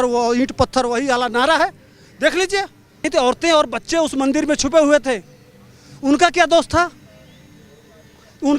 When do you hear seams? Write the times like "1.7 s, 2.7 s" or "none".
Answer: 3.0 s